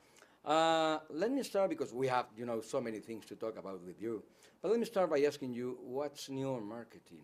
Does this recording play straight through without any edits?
yes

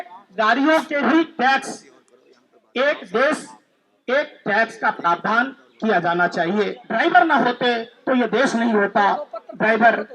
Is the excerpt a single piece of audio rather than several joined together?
no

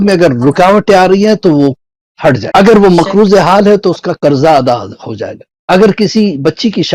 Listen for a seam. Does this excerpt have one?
yes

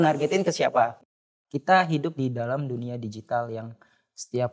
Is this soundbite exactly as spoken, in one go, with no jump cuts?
no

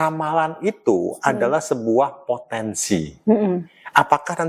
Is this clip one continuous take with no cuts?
yes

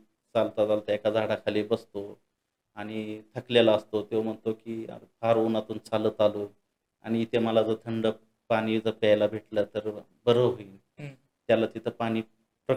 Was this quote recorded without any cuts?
yes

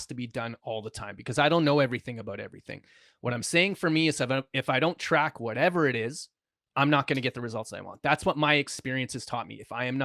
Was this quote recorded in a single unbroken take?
yes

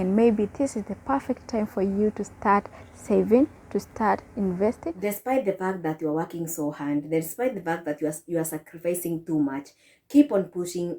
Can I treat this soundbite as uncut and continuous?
no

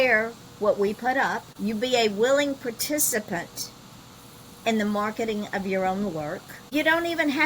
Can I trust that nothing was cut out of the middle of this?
no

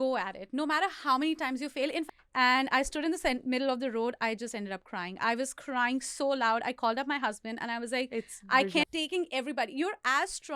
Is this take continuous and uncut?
no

